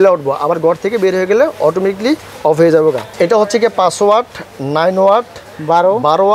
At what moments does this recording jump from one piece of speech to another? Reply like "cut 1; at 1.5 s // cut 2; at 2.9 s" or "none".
cut 1; at 3.1 s